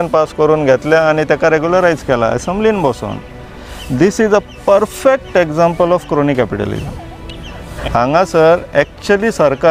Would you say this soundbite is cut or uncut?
cut